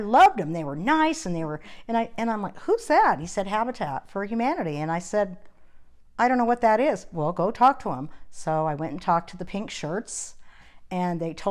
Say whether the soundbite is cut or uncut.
uncut